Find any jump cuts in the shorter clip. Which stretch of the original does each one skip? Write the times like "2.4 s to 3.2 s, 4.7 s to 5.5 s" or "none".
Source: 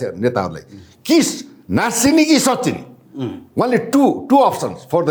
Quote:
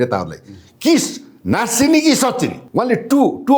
2.9 s to 3.4 s